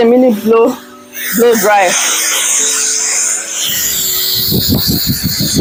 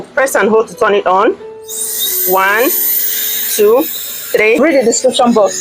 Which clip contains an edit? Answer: second; 1 cut; at 4.6 s

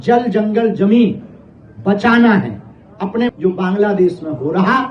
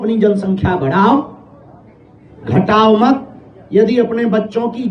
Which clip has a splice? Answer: first; 1 cut; at 3.3 s

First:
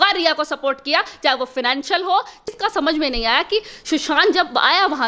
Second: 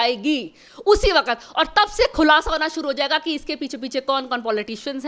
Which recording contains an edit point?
first; 1 cut; at 2.5 s

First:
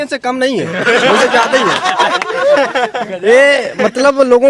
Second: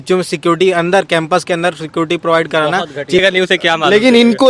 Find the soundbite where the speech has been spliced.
second; 1 cut; at 3.2 s

